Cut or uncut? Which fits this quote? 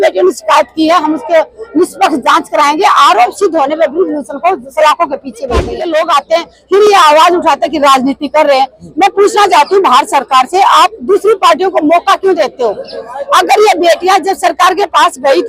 cut